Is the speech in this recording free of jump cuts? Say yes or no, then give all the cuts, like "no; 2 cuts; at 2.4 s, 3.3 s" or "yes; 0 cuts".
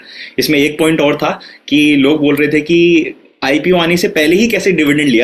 yes; 0 cuts